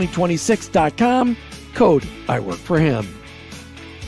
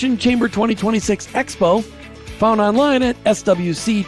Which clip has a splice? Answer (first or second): first